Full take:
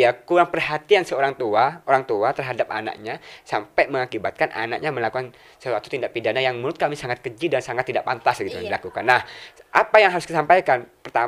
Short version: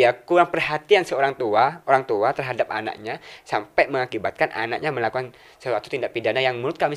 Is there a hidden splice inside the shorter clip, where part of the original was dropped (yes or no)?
no